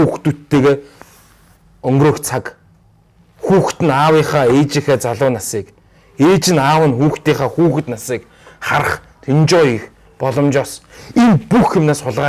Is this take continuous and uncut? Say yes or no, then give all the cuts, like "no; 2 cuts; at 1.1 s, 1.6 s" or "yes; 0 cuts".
yes; 0 cuts